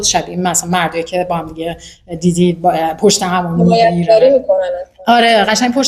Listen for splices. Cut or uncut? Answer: uncut